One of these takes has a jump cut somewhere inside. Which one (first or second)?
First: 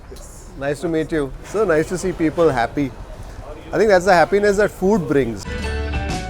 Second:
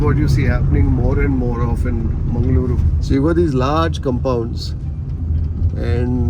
first